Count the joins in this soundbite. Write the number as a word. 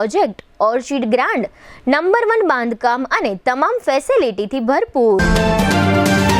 one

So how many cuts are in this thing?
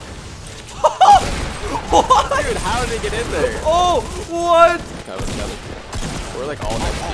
one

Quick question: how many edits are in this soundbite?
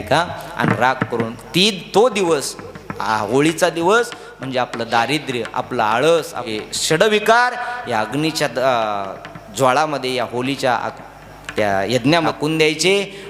two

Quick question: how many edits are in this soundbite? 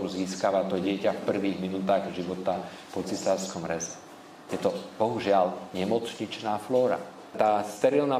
one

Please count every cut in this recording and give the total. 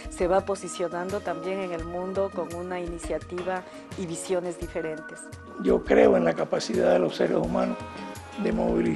one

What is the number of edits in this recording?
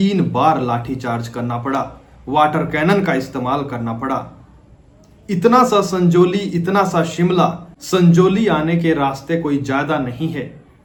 zero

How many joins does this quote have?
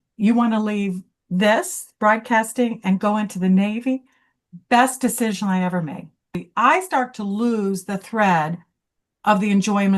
one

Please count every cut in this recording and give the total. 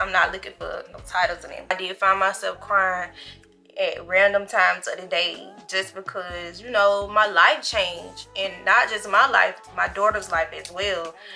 one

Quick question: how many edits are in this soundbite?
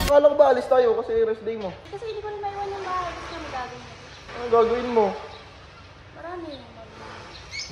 two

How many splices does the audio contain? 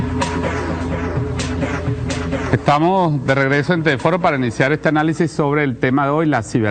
zero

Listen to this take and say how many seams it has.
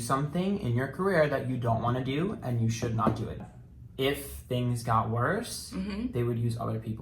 one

